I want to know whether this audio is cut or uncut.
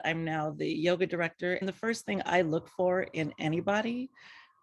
cut